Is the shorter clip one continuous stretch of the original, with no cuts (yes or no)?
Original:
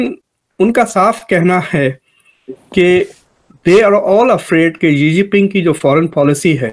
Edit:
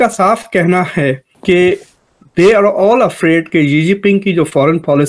no